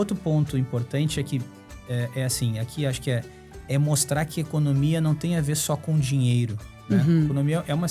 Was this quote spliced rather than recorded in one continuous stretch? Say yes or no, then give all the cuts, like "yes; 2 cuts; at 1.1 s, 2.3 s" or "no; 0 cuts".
no; 0 cuts